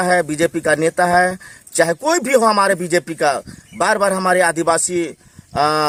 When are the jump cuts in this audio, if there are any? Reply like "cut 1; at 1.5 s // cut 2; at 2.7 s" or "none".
none